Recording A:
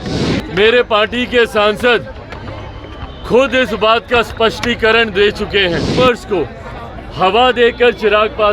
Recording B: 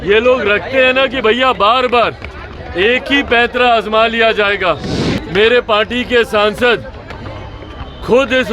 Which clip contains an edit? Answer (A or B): A